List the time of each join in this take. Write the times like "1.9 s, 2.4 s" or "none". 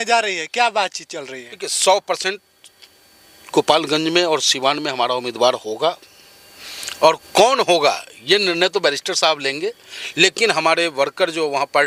none